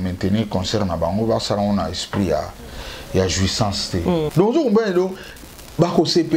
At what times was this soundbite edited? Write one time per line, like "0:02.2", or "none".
0:04.3